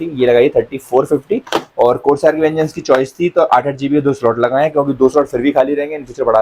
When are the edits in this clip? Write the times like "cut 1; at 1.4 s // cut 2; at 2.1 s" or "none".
none

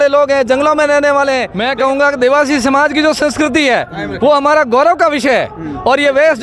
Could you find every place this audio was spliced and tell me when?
cut 1; at 1.6 s

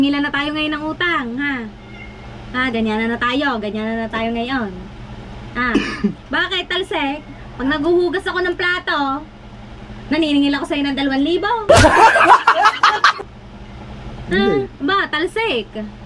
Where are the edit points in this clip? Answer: none

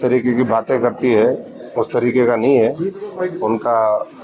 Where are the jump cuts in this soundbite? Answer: none

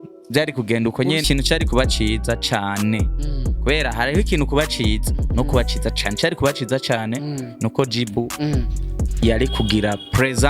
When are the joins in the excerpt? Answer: cut 1; at 1.2 s

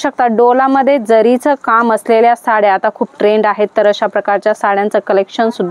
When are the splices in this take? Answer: none

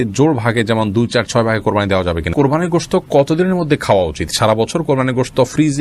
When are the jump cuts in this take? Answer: cut 1; at 2.3 s

